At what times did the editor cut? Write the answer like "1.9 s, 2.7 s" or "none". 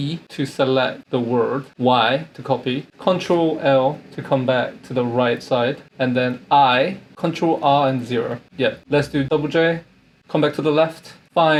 none